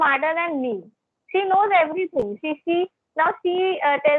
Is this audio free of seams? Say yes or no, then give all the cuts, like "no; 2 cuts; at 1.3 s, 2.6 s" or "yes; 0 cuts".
yes; 0 cuts